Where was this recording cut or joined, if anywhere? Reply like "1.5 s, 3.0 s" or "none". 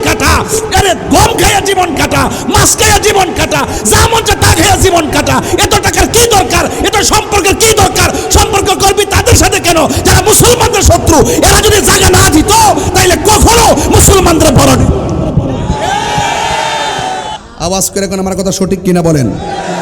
17.3 s